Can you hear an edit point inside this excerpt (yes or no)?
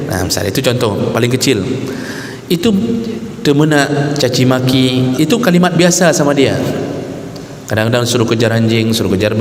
no